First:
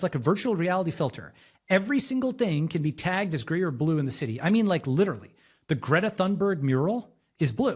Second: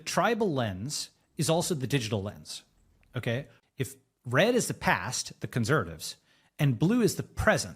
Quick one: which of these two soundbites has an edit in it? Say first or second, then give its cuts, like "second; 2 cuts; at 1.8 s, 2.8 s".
second; 1 cut; at 3.6 s